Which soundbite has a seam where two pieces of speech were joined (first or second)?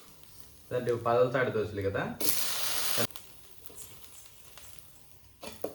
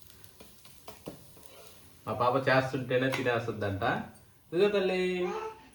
first